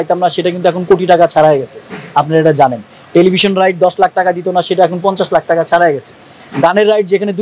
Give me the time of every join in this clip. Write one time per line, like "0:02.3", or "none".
none